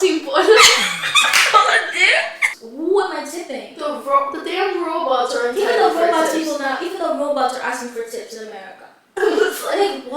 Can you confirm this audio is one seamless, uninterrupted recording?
no; 1 cut; at 2.6 s

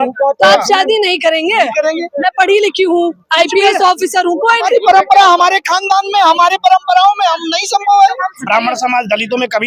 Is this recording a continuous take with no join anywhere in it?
no; 1 cut; at 8.4 s

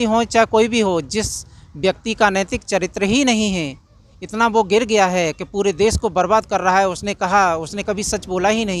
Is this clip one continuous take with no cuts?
yes; 0 cuts

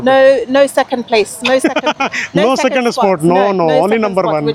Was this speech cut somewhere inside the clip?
no; 0 cuts

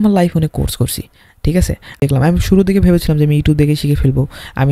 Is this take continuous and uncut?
no; 1 cut; at 2.0 s

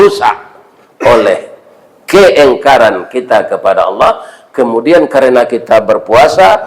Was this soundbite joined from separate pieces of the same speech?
no; 0 cuts

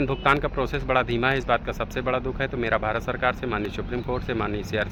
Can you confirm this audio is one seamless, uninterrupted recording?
yes; 0 cuts

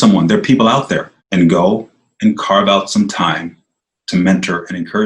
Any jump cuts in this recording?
yes; 1 cut; at 1.1 s

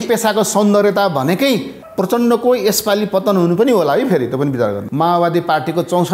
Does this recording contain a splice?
yes; 2 cuts; at 1.8 s, 4.8 s

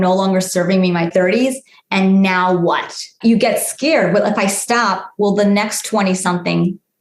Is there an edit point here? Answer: yes; 2 cuts; at 1.1 s, 3.0 s

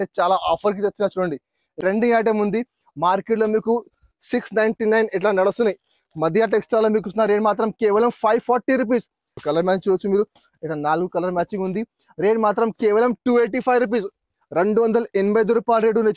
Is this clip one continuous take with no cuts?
no; 2 cuts; at 1.8 s, 9.4 s

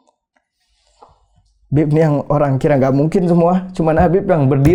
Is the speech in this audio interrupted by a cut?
no; 0 cuts

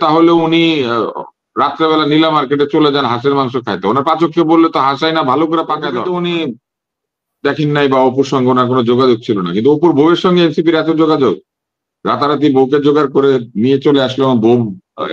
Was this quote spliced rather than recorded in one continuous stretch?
yes; 1 cut; at 6.0 s

